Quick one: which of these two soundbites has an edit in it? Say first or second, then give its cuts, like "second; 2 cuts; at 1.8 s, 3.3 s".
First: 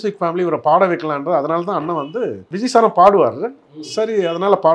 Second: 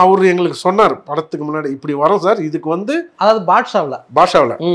first; 1 cut; at 2.4 s